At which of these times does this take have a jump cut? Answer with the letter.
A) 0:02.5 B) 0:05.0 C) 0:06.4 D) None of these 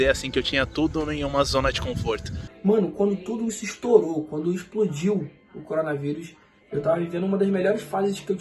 A